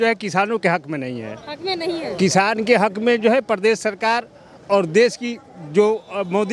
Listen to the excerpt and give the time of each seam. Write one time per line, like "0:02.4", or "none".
none

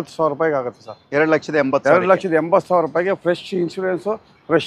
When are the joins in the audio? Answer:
none

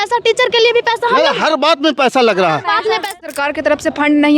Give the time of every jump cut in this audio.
0:03.2

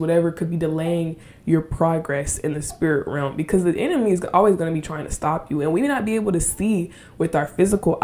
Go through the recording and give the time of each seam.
none

